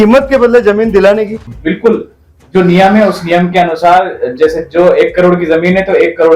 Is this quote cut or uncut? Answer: cut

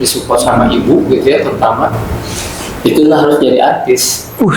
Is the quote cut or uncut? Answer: uncut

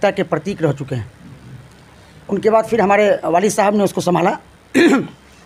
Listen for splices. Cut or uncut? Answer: uncut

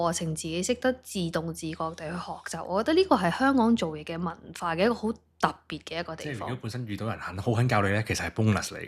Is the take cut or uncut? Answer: uncut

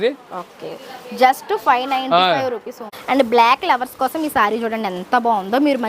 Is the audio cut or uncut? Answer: cut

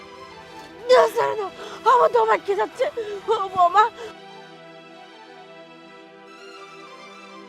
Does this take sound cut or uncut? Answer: uncut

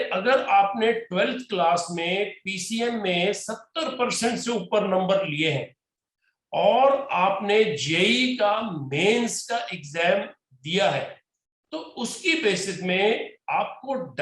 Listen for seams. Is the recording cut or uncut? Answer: uncut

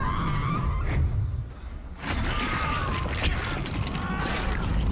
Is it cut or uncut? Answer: uncut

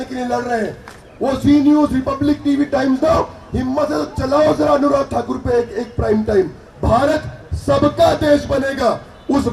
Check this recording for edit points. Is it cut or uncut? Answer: cut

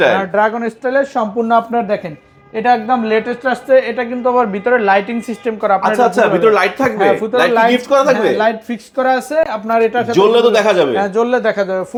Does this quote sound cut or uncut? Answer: uncut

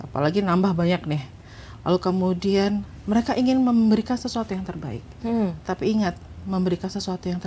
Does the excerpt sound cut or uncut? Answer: uncut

